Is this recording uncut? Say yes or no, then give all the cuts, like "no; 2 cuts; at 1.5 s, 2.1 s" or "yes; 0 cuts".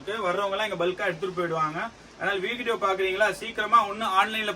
yes; 0 cuts